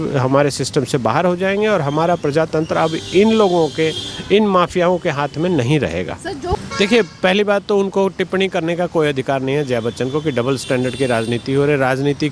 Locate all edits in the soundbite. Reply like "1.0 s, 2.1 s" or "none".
6.6 s